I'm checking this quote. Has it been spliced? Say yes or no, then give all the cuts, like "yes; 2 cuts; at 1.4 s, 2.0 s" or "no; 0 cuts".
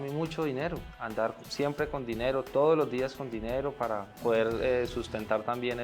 yes; 1 cut; at 1.0 s